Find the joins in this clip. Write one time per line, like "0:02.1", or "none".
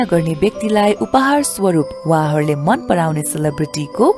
none